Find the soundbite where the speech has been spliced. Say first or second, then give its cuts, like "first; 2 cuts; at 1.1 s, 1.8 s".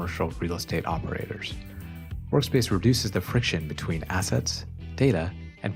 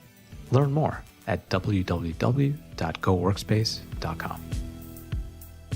second; 1 cut; at 4.3 s